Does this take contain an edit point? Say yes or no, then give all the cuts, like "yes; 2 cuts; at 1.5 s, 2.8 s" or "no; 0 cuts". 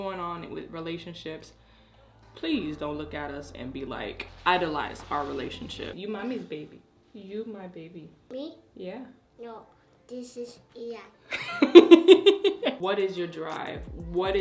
yes; 2 cuts; at 5.9 s, 12.8 s